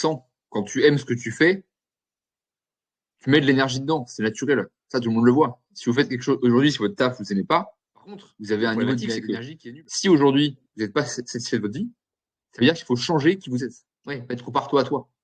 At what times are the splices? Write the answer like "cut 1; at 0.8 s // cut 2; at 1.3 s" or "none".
cut 1; at 9.2 s // cut 2; at 14.2 s